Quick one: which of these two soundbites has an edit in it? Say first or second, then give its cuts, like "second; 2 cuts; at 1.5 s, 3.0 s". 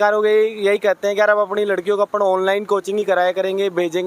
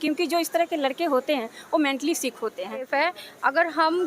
second; 1 cut; at 2.9 s